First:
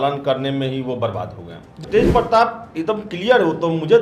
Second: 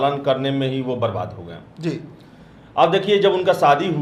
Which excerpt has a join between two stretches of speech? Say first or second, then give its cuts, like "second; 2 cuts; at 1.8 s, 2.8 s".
first; 1 cut; at 1.8 s